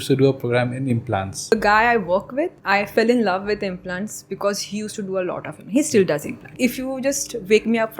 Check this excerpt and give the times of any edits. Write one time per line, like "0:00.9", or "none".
0:01.5
0:02.6
0:06.5